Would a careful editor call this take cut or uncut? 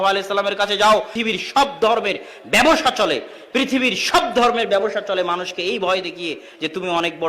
cut